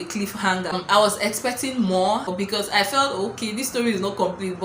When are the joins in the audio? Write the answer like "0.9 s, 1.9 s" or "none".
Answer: 0.8 s, 2.3 s